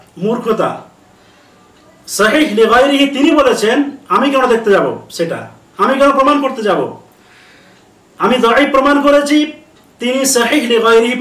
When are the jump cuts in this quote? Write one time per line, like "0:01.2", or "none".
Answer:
0:02.1